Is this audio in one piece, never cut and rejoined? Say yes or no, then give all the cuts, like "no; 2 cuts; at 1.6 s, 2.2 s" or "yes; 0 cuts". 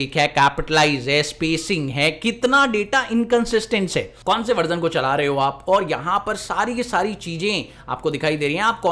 no; 1 cut; at 4.1 s